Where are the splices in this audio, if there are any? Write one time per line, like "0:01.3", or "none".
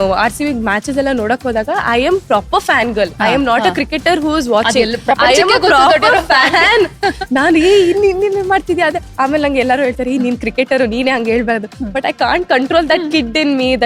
none